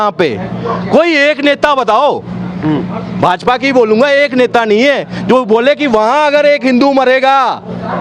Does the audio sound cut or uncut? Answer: uncut